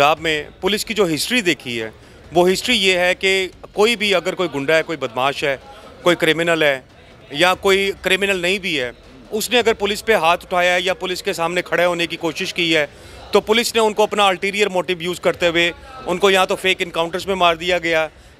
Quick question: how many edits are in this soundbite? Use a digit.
0